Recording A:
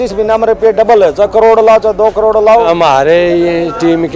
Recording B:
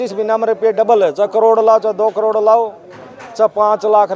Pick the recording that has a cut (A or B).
A